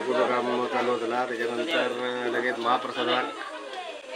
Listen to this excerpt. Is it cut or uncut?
uncut